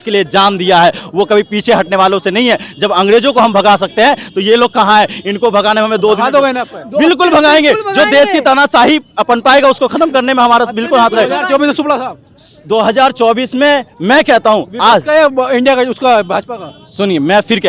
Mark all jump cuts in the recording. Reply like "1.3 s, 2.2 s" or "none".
none